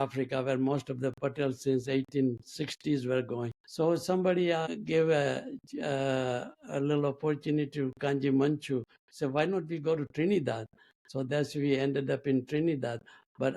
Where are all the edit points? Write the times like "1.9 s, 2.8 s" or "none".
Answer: 3.6 s, 4.6 s, 6.6 s, 9.0 s